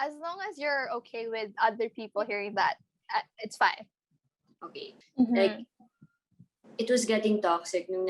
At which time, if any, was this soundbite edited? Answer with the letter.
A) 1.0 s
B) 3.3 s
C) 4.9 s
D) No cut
C